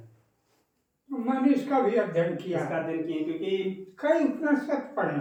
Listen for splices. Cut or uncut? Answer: uncut